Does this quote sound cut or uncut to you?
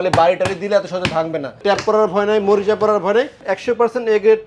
cut